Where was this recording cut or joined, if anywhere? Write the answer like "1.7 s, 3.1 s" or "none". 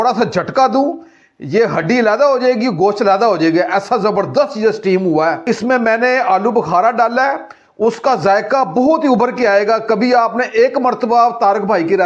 5.4 s